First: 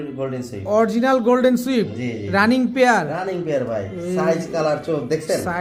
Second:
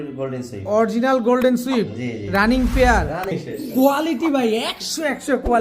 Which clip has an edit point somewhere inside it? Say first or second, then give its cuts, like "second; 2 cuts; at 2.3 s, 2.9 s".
second; 1 cut; at 3.3 s